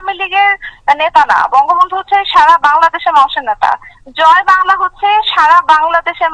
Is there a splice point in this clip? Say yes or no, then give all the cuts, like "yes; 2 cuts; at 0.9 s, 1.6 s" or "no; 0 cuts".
no; 0 cuts